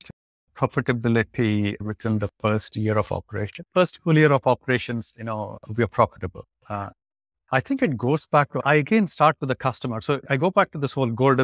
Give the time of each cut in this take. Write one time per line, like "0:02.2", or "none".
0:01.8
0:08.6
0:10.2